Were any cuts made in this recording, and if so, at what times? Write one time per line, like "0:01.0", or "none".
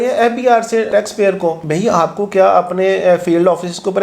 none

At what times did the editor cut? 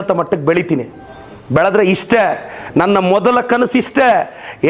none

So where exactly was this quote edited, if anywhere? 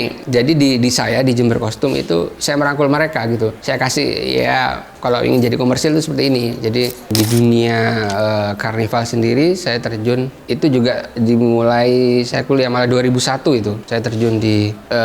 0:07.1

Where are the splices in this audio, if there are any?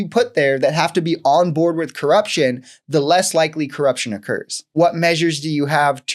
0:04.7

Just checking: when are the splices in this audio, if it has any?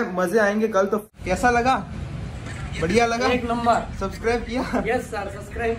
0:01.0

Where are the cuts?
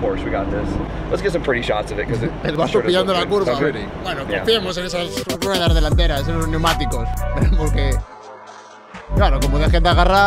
none

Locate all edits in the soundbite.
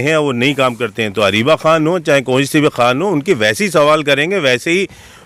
none

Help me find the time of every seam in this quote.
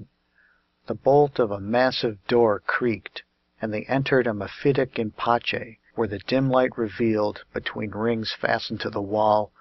0:05.8

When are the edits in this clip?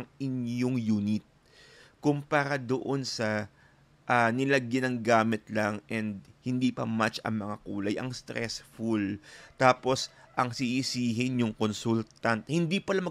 none

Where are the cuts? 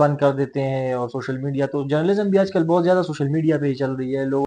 none

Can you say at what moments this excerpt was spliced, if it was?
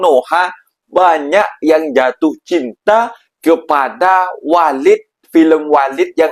none

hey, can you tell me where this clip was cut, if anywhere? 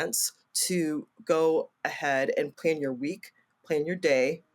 0:02.5

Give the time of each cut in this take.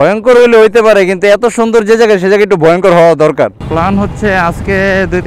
0:03.6

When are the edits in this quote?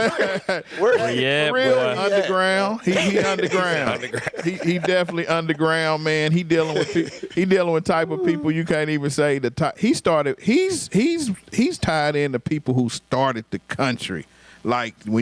none

